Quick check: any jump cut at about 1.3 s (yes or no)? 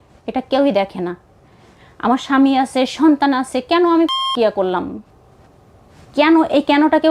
no